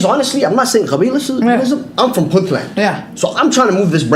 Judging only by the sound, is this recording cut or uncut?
uncut